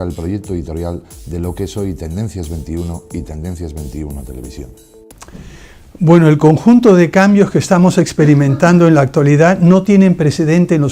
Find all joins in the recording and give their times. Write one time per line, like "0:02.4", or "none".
none